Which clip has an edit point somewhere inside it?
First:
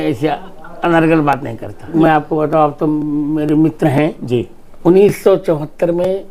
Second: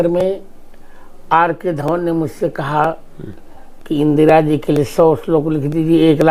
first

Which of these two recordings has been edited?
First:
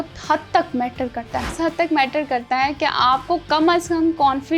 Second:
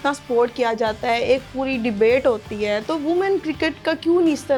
first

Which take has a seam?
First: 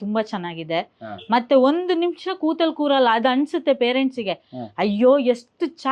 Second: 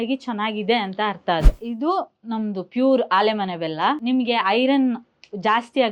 second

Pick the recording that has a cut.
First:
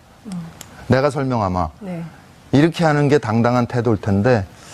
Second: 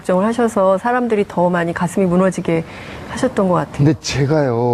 first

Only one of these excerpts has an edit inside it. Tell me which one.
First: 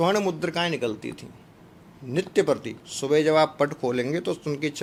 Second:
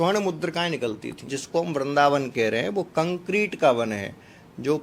second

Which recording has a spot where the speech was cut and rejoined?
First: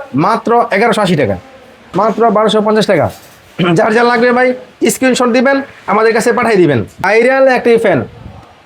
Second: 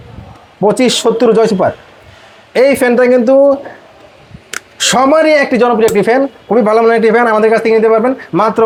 first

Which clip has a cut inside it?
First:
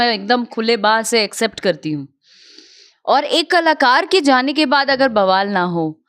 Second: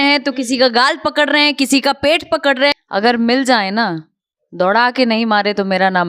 second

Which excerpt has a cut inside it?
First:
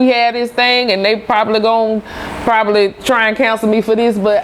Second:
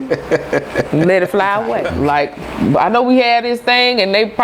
second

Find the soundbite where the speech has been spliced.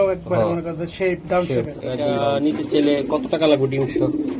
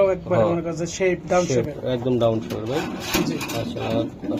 first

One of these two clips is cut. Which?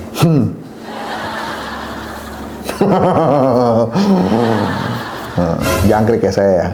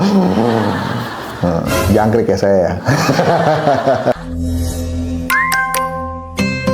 second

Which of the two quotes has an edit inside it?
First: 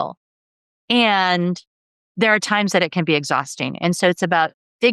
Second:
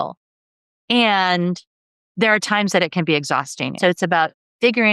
second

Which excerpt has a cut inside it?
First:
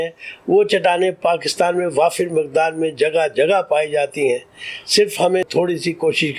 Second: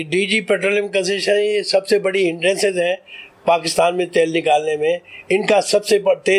first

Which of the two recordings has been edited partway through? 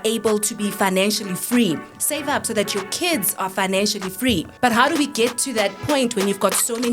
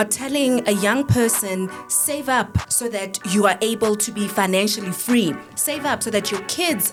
first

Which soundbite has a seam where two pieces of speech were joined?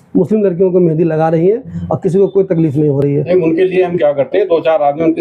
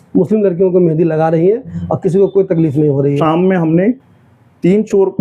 second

